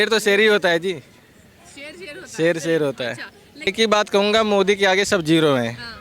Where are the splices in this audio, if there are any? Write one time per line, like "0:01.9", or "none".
0:03.7